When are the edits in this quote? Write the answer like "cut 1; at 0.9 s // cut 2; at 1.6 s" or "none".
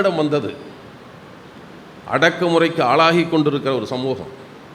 none